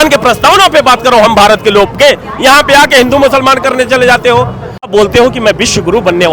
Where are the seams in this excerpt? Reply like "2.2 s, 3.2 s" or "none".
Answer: 4.9 s